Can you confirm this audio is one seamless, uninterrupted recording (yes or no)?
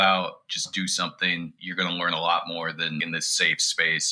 yes